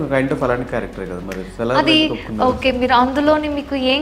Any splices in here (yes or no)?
no